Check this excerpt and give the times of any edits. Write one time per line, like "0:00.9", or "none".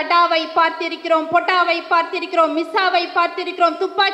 none